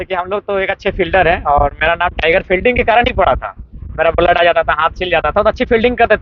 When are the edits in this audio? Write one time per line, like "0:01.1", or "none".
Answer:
none

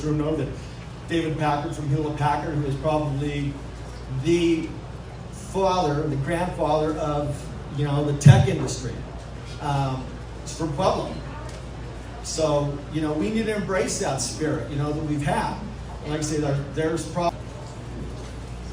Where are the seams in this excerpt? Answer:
0:17.3

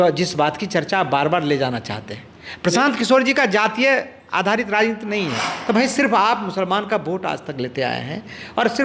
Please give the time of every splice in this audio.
0:05.5

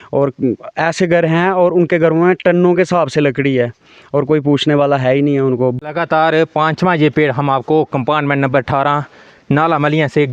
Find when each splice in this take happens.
0:05.8

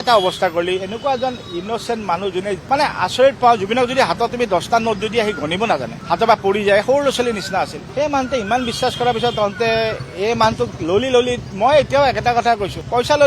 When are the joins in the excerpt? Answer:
0:02.6

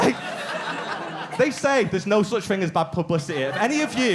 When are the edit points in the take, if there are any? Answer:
none

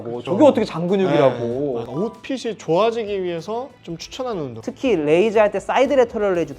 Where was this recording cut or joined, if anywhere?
0:01.8
0:04.6

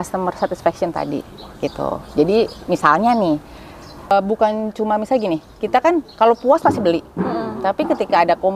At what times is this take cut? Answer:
0:04.1

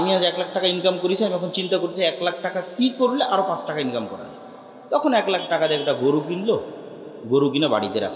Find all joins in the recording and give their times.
none

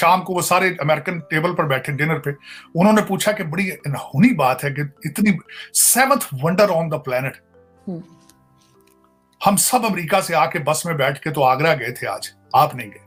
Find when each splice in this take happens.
none

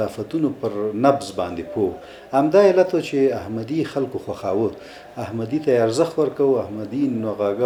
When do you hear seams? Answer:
none

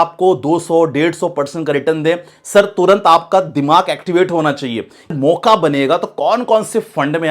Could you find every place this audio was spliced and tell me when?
0:05.1

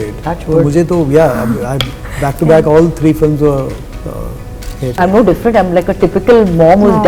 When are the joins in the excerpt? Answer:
0:05.0

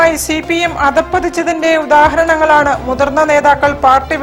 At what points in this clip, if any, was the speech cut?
none

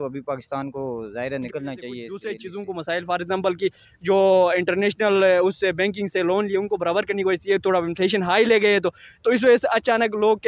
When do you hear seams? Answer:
0:02.1

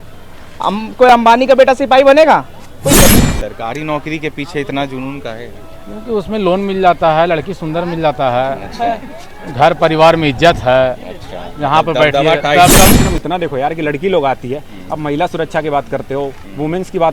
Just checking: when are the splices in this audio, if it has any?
0:03.0
0:12.9

